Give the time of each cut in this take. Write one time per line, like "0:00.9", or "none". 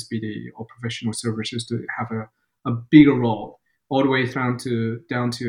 none